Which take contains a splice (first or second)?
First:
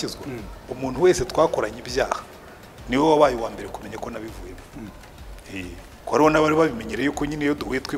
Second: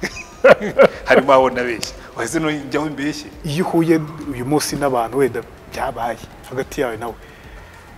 second